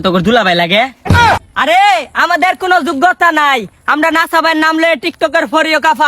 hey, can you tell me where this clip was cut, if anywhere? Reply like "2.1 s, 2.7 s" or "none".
1.1 s

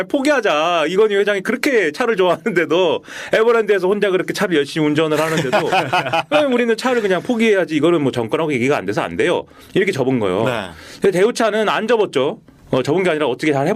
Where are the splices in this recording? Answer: none

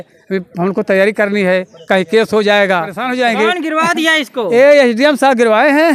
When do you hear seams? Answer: 3.0 s

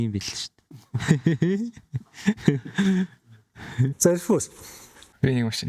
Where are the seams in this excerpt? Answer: none

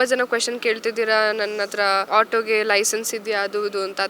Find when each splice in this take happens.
2.1 s

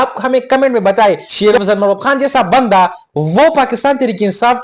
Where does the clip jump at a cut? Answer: 1.3 s

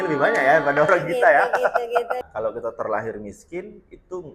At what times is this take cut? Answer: 2.2 s

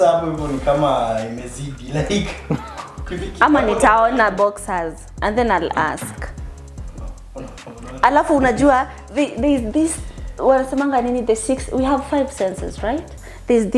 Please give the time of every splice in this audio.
none

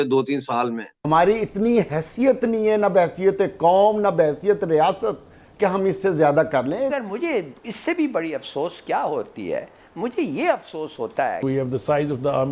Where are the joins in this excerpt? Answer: 0.9 s, 6.9 s, 11.4 s

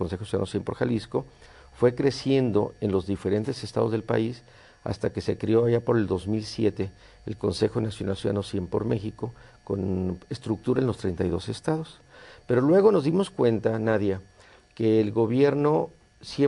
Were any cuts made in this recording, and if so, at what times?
7.3 s

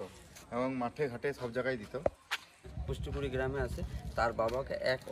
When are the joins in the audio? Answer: 2.7 s

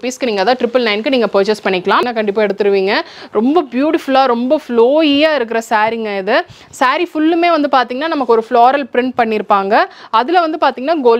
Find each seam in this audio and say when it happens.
2.0 s

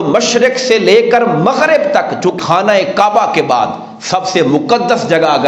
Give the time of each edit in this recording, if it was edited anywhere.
2.3 s

